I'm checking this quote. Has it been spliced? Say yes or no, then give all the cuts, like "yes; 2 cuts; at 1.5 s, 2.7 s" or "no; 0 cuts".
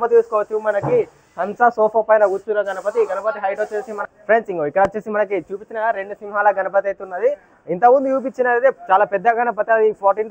yes; 1 cut; at 4.0 s